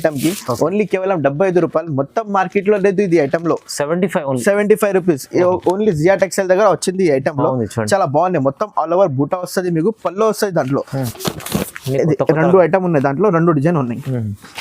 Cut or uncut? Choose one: cut